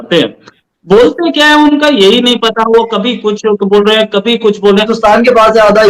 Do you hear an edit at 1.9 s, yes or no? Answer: no